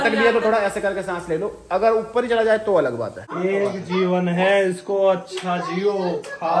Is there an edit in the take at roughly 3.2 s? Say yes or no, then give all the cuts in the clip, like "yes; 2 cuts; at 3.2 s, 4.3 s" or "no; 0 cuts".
yes; 1 cut; at 3.2 s